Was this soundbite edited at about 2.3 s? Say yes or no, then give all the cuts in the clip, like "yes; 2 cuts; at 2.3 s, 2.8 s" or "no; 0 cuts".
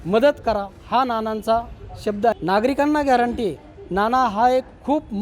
yes; 1 cut; at 2.3 s